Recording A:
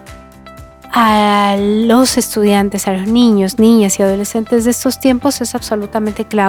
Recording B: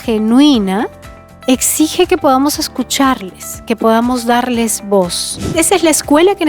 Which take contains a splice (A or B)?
B